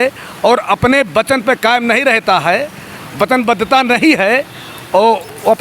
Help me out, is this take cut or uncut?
uncut